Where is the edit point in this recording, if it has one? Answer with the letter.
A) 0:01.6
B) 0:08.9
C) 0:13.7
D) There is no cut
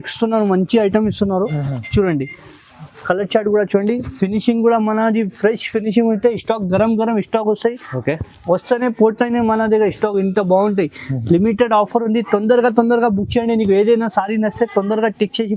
D